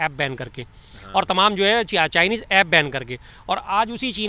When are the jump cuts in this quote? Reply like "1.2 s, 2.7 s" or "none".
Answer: none

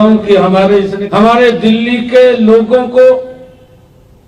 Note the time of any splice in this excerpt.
1.0 s

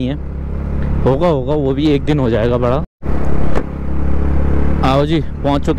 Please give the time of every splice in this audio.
2.9 s

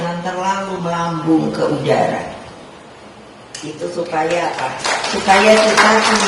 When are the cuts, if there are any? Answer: none

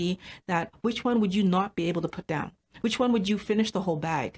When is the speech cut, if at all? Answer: none

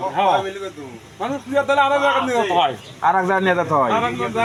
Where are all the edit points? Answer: none

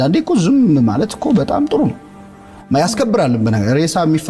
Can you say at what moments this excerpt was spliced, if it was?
none

